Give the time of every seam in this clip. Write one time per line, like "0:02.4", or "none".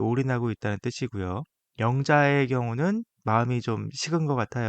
0:01.6